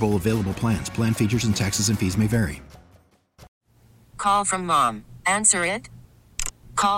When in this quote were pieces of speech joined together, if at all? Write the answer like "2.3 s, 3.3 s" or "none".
3.5 s